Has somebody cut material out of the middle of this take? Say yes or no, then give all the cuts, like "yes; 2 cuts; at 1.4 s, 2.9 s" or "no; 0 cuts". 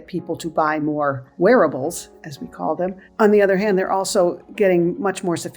yes; 2 cuts; at 1.3 s, 3.0 s